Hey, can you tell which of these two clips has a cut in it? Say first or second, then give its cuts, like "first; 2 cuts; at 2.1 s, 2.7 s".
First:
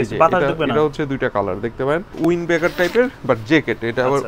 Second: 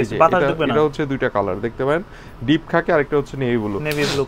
first; 1 cut; at 2.1 s